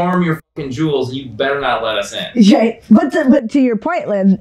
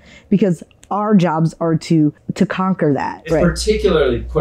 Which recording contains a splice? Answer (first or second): second